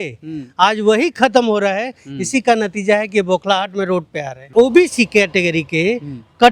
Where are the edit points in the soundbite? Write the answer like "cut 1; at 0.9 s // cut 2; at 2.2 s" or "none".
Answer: cut 1; at 4.5 s